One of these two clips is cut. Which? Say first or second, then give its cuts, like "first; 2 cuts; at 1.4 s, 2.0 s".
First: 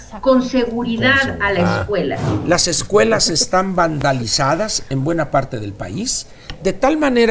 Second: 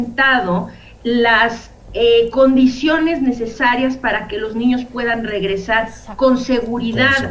first; 1 cut; at 2.3 s